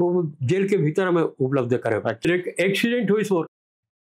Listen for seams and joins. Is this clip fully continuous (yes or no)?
no